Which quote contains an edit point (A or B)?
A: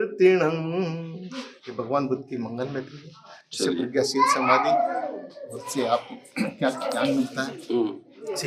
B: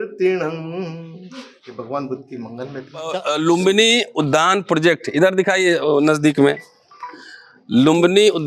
B